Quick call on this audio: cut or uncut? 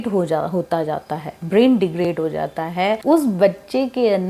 cut